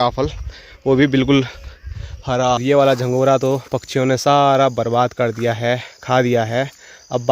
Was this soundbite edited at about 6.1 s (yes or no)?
no